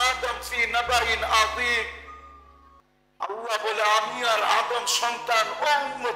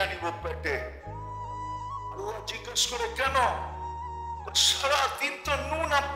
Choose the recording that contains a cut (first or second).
second